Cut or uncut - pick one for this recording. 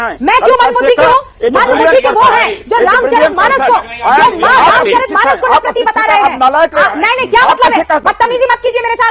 uncut